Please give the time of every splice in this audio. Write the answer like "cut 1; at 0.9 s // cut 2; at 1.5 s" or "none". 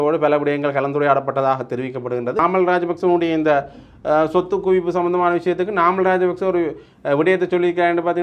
cut 1; at 2.4 s